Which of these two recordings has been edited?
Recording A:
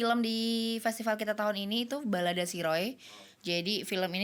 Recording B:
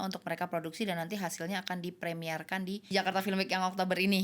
B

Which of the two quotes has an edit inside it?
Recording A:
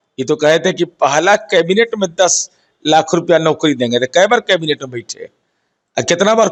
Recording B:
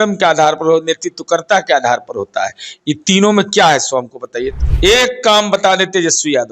B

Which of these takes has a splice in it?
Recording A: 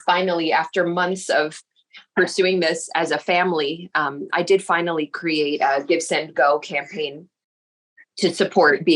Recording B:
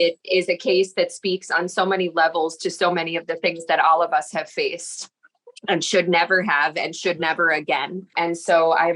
B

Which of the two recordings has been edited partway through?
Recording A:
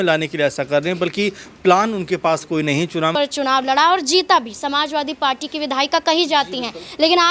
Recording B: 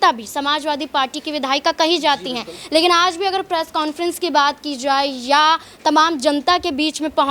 A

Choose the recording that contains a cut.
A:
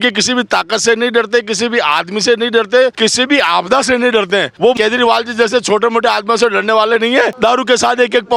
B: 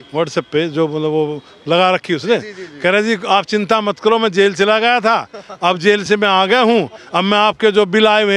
A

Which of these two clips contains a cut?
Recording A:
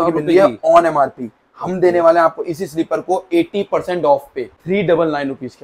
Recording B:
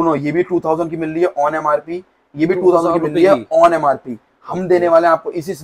A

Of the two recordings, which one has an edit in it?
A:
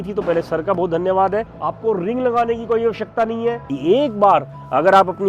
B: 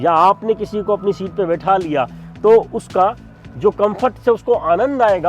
A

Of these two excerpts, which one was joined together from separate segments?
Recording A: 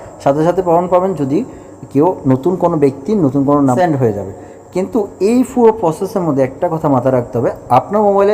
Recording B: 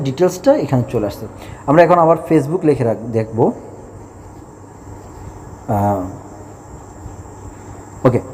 A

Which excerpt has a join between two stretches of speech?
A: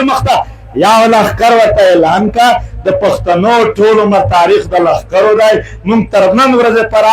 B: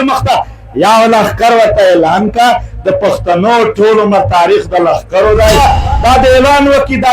B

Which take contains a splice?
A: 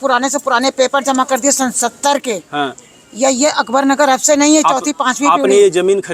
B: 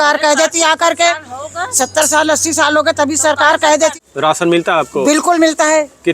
B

